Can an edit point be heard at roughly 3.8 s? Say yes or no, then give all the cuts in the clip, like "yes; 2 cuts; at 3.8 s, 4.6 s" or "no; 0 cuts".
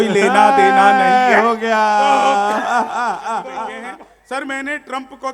yes; 1 cut; at 3.8 s